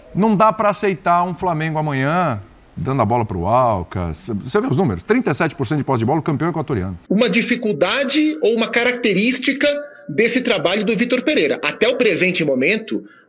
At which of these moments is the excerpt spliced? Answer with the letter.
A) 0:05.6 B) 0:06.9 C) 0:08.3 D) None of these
B